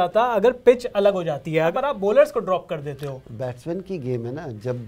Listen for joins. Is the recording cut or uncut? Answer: cut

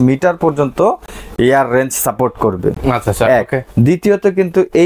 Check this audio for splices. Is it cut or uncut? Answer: uncut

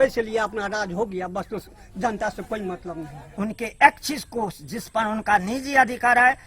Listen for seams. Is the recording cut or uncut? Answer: cut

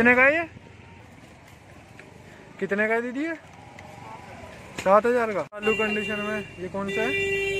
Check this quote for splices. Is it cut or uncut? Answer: cut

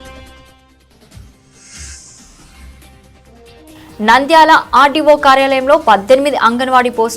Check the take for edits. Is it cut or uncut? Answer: cut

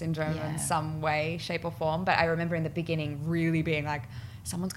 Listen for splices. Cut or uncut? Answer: uncut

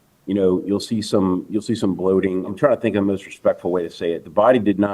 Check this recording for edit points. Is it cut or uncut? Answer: cut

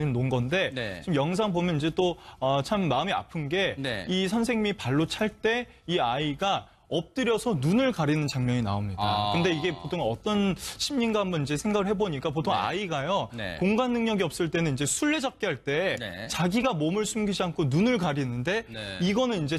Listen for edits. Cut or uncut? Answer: uncut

